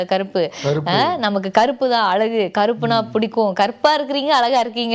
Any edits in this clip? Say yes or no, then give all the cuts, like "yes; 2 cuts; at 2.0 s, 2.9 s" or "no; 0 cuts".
no; 0 cuts